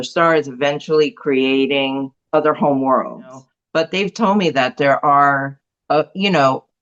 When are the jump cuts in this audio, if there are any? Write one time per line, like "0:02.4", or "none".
0:02.1
0:03.6